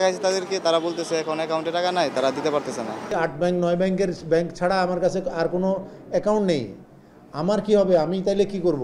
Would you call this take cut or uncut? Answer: cut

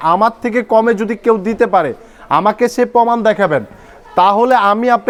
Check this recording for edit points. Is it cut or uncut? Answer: uncut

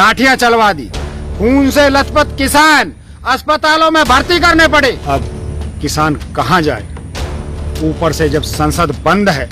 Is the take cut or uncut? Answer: cut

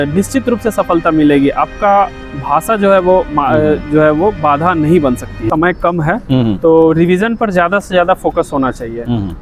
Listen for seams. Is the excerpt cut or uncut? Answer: cut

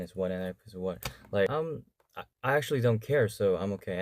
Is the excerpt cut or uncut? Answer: cut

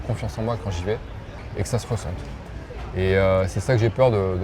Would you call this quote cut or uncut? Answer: uncut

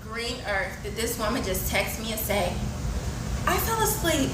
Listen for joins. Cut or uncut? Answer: uncut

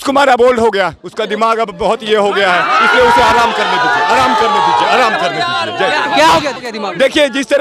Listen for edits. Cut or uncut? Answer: cut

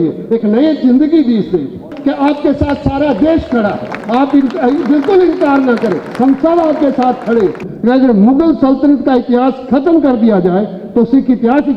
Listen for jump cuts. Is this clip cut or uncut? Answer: cut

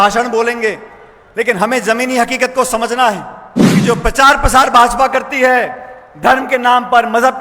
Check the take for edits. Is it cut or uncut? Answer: cut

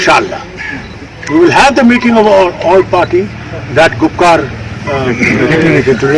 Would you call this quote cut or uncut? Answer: uncut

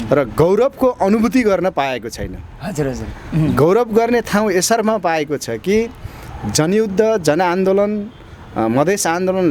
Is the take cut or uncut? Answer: uncut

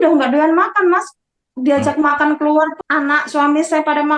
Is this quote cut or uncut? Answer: cut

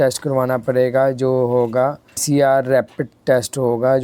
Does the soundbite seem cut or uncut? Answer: cut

